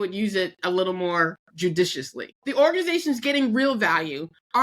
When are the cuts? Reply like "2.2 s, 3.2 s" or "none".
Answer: 1.4 s, 2.3 s